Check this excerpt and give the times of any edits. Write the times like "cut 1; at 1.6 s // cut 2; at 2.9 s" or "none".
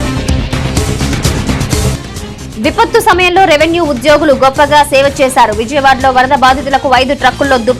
none